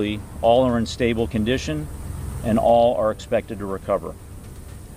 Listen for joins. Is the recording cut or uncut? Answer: uncut